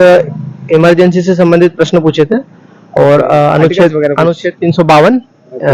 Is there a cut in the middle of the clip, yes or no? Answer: no